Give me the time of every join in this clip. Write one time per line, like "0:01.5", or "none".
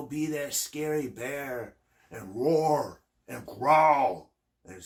none

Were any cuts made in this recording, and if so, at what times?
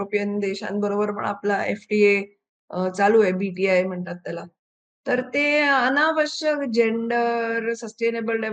none

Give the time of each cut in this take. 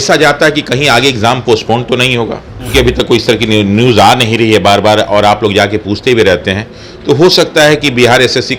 0:02.7

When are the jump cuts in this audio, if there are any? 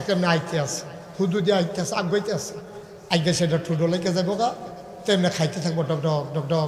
none

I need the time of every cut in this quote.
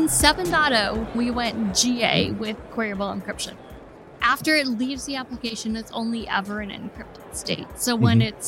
0:01.1
0:03.8

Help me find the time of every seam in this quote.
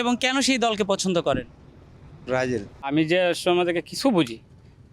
0:02.9

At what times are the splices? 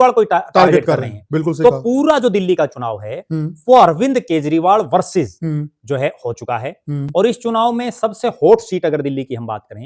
none

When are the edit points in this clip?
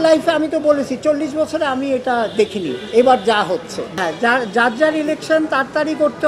0:03.8

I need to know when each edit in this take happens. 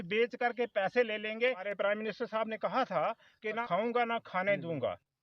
0:01.6
0:03.6

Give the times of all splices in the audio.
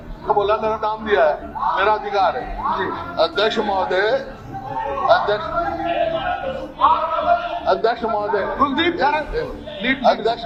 none

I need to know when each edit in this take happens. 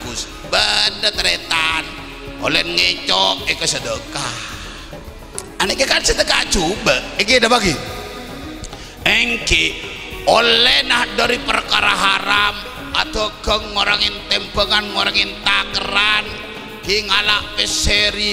none

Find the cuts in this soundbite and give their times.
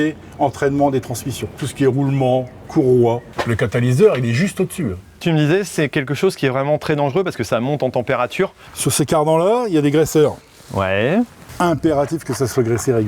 0:01.6
0:03.3
0:05.2
0:08.6
0:11.4

